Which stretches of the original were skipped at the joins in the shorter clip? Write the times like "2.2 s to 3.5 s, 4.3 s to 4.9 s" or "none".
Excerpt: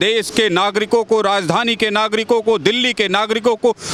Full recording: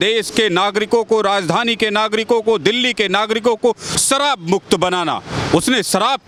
none